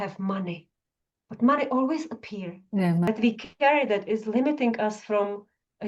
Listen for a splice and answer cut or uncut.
cut